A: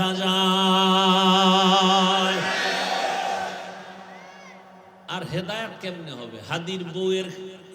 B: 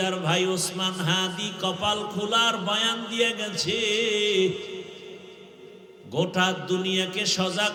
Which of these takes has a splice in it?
A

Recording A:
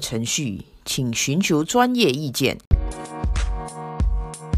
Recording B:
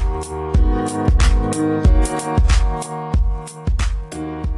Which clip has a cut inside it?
A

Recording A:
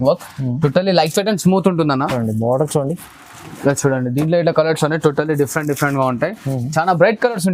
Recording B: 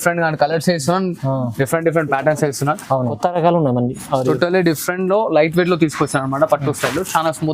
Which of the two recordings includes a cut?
B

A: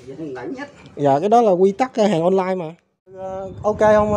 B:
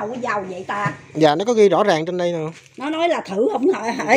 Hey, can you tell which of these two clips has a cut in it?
A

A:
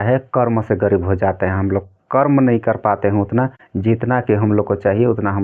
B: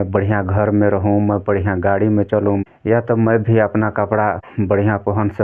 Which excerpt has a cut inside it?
B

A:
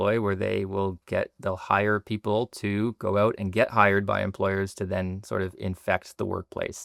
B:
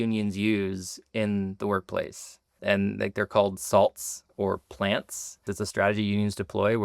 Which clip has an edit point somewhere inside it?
B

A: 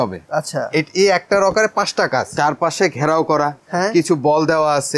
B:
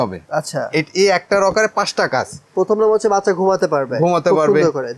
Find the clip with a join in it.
A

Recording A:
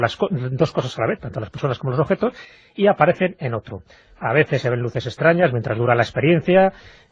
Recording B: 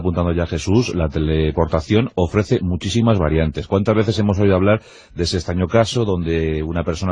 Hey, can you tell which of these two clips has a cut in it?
A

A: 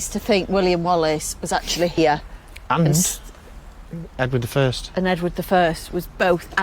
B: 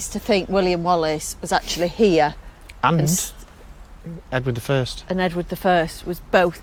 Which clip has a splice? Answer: A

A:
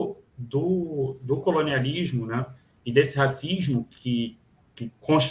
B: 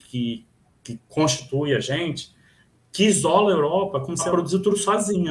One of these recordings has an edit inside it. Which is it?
B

